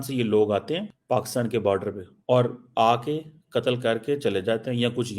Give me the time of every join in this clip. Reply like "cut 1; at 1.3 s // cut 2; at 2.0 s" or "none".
cut 1; at 0.9 s // cut 2; at 2.1 s